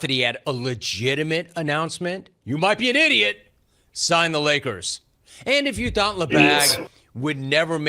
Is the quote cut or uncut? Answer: cut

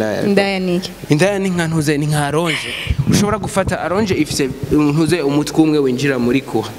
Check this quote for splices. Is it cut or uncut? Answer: cut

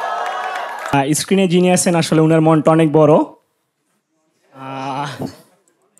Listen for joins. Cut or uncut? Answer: cut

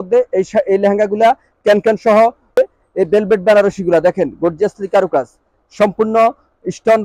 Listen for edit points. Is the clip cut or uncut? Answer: cut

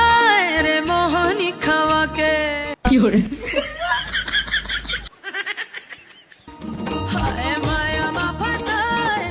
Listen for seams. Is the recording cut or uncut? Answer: uncut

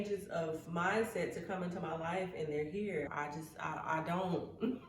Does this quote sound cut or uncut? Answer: cut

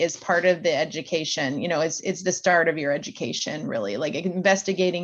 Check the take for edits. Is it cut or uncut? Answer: uncut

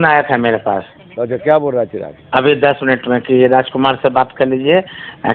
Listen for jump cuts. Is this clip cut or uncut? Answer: uncut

